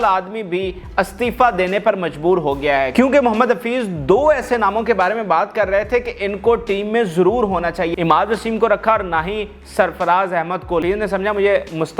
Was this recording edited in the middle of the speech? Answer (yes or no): yes